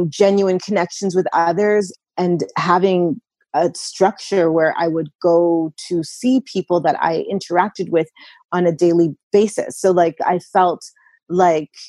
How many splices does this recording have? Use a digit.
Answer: 1